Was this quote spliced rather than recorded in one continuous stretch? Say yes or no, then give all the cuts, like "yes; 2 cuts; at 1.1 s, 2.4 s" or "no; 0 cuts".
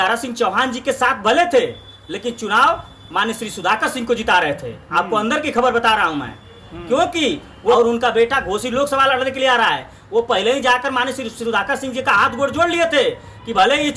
yes; 1 cut; at 7.7 s